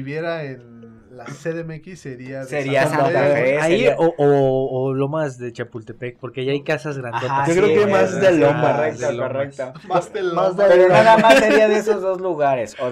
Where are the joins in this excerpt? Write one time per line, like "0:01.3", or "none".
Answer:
none